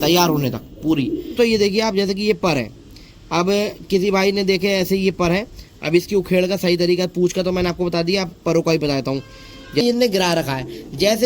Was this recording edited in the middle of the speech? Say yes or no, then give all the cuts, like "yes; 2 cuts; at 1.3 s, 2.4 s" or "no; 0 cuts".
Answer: yes; 2 cuts; at 1.3 s, 9.8 s